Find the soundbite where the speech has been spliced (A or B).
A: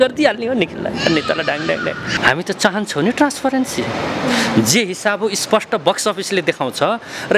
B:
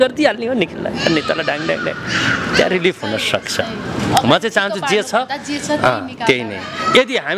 A